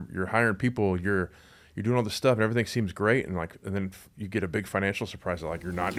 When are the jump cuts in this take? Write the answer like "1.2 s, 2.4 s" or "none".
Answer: none